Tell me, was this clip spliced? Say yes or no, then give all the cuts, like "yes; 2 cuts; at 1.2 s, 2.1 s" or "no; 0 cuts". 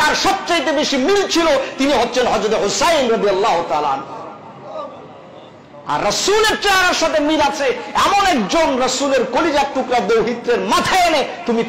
no; 0 cuts